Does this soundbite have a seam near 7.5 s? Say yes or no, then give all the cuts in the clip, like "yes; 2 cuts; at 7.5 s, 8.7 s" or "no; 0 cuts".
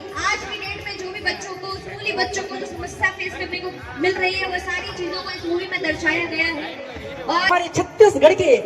yes; 1 cut; at 7.5 s